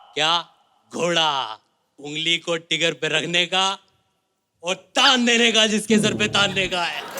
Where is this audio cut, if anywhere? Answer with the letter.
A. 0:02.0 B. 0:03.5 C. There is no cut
A